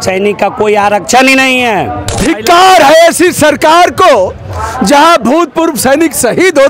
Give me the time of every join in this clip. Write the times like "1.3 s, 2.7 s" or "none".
2.2 s